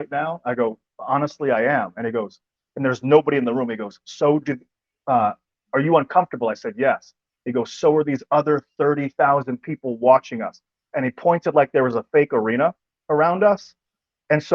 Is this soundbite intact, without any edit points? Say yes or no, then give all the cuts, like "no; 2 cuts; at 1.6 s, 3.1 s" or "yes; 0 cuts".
yes; 0 cuts